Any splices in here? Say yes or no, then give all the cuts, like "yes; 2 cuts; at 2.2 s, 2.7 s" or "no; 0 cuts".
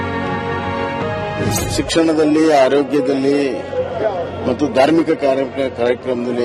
no; 0 cuts